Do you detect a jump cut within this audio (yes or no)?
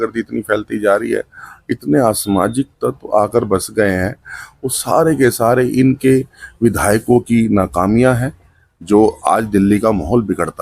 no